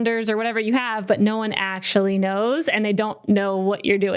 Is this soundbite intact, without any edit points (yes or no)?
yes